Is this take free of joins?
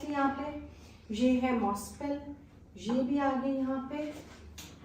yes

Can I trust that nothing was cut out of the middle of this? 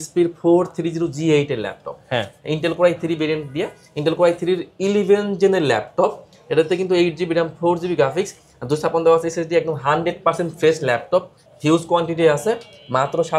yes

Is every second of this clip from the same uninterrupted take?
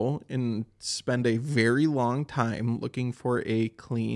yes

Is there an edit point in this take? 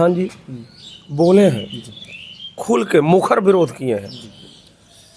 no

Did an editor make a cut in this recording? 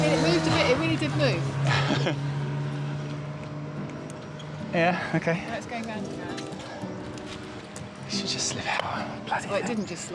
no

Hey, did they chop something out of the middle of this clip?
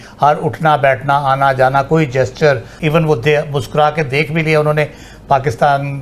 yes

